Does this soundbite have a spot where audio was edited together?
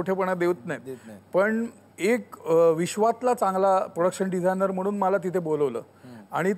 yes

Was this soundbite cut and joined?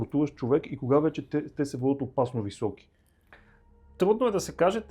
no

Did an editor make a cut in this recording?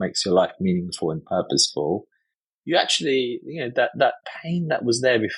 no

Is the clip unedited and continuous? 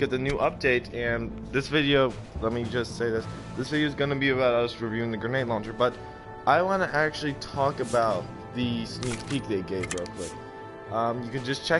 yes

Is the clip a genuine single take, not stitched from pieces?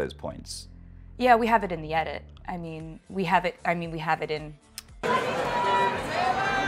yes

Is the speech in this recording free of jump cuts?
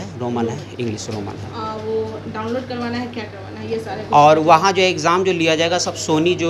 yes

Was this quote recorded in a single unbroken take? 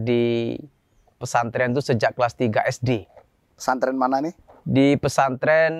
yes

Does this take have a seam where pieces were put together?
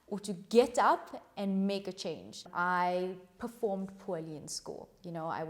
yes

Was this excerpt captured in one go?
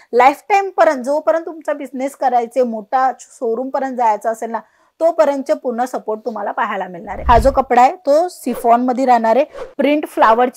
no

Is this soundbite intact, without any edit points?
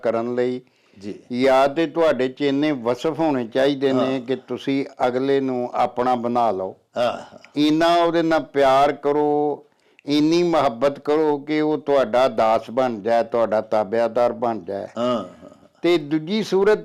yes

